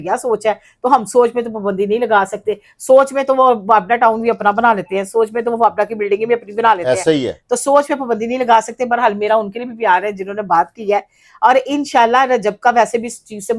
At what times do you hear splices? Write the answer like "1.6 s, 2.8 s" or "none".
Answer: none